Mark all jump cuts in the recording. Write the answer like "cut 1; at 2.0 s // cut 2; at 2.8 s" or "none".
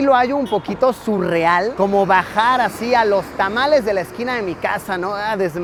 none